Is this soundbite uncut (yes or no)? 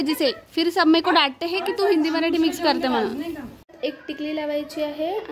no